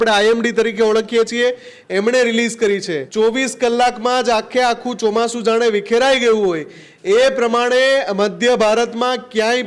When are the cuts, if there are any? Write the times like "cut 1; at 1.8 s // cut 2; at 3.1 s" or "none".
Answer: cut 1; at 3.0 s

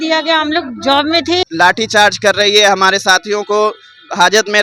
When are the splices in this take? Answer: cut 1; at 1.4 s

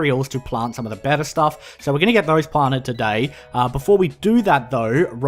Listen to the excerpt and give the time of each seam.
cut 1; at 3.9 s

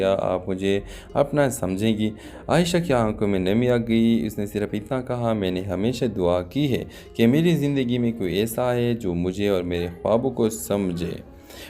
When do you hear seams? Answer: cut 1; at 3.3 s

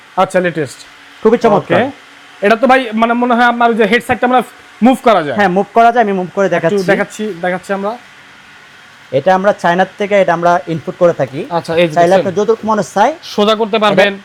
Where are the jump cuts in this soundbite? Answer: none

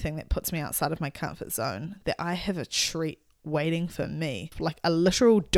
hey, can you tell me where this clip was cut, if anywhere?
cut 1; at 4.5 s

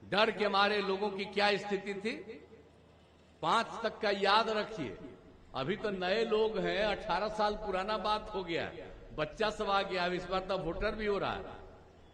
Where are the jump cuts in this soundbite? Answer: none

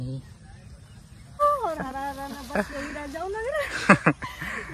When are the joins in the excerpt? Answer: cut 1; at 1.4 s

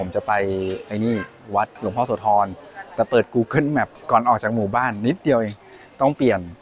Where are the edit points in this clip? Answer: cut 1; at 1.7 s // cut 2; at 4.0 s

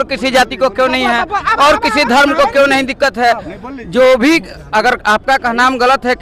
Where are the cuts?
none

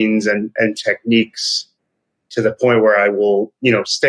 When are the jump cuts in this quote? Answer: none

